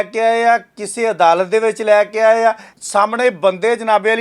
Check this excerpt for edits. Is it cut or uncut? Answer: cut